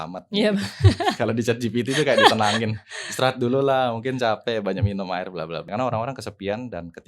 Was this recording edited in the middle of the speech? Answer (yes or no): yes